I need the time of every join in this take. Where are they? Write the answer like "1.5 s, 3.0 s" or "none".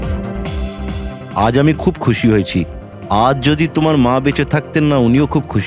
1.2 s